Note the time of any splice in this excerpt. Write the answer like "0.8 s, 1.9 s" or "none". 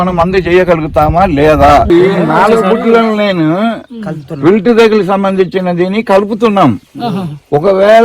1.9 s